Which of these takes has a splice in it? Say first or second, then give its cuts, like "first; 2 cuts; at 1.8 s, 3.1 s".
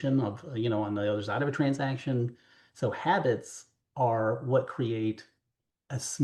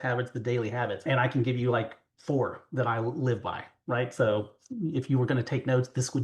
second; 1 cut; at 1.1 s